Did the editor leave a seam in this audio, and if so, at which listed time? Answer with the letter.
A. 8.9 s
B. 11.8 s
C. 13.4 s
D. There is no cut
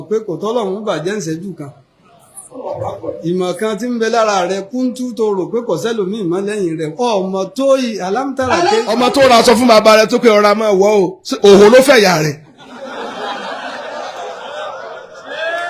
A